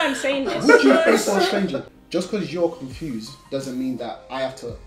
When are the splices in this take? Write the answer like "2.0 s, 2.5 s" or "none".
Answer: 2.0 s